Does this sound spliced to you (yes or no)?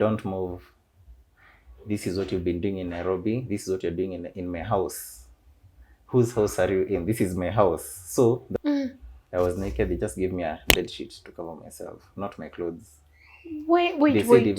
yes